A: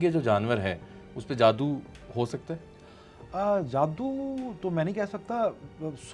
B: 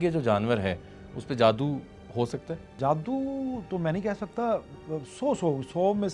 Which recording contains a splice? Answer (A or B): B